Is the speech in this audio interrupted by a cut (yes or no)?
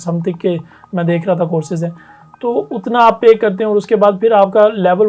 no